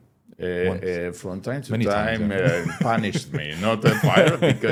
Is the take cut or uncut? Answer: uncut